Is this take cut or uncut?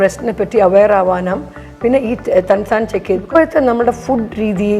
cut